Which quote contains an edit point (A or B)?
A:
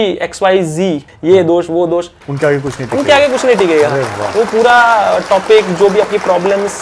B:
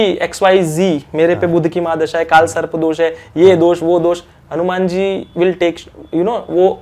A